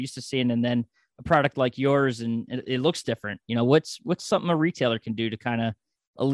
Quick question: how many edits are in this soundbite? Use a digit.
0